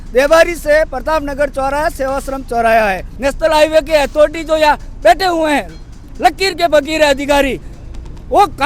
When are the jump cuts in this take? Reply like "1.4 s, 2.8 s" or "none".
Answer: 3.1 s

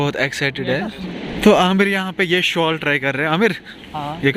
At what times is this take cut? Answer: 1.1 s

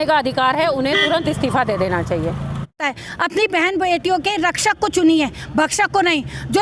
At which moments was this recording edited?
2.8 s

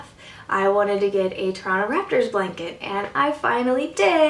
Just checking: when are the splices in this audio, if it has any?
none

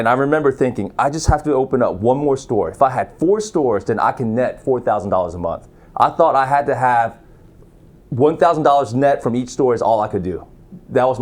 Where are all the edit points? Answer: none

